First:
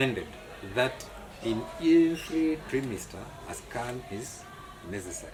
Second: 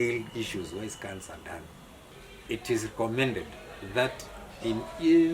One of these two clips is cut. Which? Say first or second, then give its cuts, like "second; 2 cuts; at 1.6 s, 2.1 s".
second; 1 cut; at 2.1 s